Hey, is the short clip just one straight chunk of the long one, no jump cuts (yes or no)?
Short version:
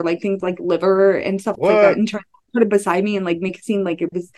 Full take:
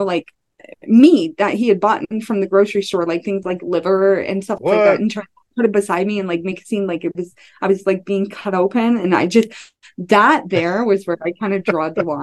yes